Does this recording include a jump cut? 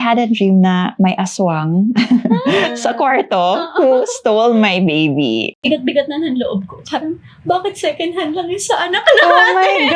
yes; 1 cut; at 5.6 s

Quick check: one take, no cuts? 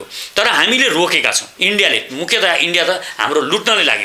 no; 1 cut; at 1.5 s

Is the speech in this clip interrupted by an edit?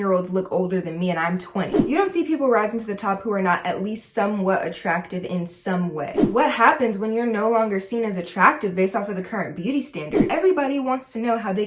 yes; 3 cuts; at 1.8 s, 6.2 s, 10.2 s

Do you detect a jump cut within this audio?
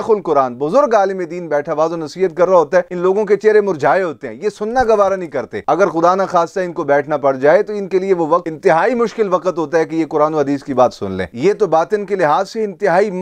no; 0 cuts

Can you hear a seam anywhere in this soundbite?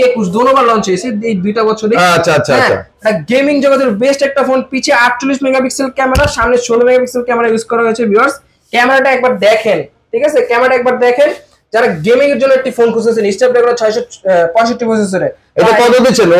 no; 0 cuts

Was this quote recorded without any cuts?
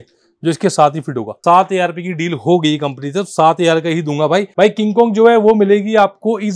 no; 2 cuts; at 1.3 s, 4.5 s

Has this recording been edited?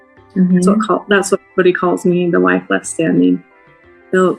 yes; 1 cut; at 2.2 s

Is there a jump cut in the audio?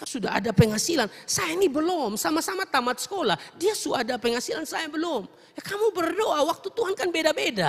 no; 0 cuts

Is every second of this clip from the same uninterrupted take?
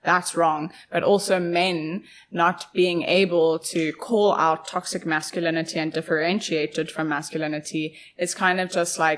yes; 0 cuts

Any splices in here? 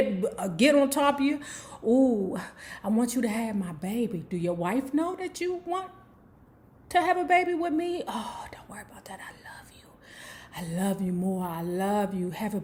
no; 0 cuts

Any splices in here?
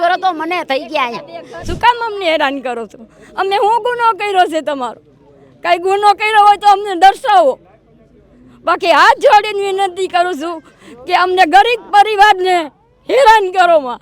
yes; 1 cut; at 1.7 s

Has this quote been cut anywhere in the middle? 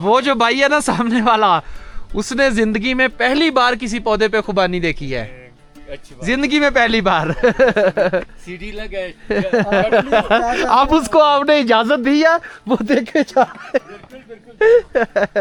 no; 0 cuts

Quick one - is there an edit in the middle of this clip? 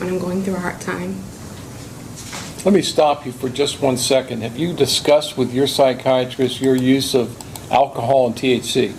no; 0 cuts

